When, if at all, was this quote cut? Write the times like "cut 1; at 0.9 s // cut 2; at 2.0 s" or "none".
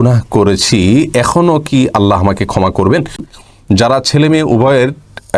cut 1; at 3.3 s